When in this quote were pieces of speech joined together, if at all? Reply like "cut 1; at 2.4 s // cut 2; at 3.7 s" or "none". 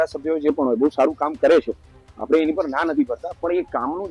none